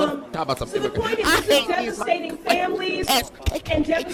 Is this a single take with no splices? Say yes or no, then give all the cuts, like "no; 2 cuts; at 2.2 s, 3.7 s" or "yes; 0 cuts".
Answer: yes; 0 cuts